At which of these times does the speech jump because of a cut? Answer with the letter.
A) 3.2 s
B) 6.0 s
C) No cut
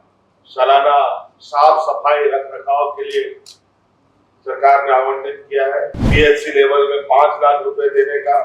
B